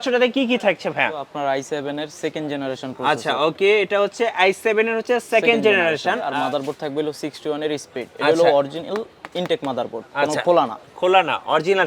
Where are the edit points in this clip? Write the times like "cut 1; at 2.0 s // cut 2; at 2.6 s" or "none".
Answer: cut 1; at 1.3 s // cut 2; at 6.2 s